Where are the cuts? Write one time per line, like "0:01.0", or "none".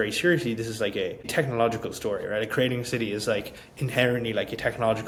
none